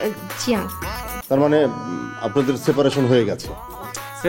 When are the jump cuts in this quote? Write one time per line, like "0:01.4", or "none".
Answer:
0:01.1